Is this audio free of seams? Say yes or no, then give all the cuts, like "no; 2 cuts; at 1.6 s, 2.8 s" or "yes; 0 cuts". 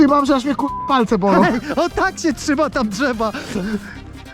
yes; 0 cuts